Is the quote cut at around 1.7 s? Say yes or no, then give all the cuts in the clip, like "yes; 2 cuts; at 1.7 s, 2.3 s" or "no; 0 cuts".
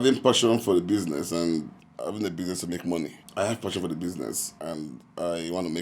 no; 2 cuts; at 3.2 s, 4.5 s